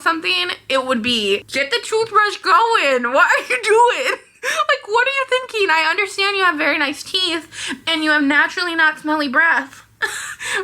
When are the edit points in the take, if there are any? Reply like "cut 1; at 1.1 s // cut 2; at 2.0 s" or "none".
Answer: cut 1; at 1.5 s